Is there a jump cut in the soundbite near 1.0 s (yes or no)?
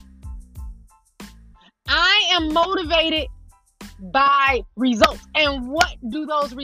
yes